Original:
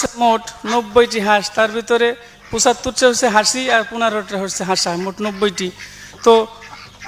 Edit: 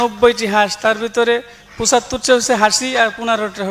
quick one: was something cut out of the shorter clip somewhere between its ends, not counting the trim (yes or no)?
no